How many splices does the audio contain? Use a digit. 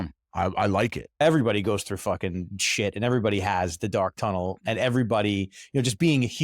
1